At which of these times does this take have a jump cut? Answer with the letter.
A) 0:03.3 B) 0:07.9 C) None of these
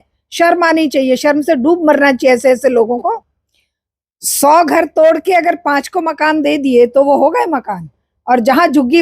A